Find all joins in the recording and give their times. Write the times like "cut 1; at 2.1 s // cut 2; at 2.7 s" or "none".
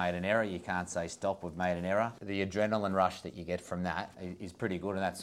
cut 1; at 2.2 s // cut 2; at 4.2 s